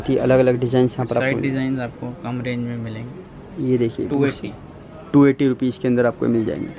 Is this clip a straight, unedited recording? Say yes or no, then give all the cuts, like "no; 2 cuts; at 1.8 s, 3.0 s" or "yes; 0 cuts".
yes; 0 cuts